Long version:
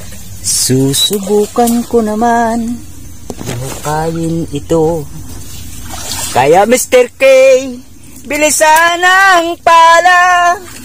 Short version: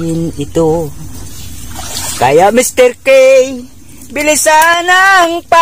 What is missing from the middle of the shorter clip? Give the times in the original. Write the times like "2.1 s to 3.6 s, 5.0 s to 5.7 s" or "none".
none